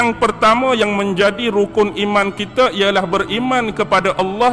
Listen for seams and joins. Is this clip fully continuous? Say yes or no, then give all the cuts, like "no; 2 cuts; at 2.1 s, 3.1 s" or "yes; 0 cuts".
yes; 0 cuts